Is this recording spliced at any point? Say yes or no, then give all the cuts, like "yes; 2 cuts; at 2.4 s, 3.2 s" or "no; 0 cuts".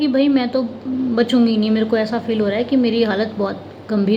no; 0 cuts